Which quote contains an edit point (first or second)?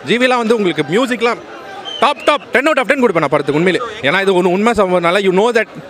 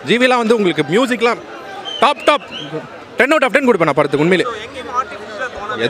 first